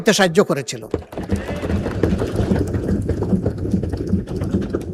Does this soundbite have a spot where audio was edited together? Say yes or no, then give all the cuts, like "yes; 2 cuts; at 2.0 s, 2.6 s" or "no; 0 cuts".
no; 0 cuts